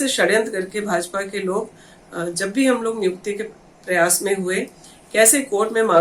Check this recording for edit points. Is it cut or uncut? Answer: uncut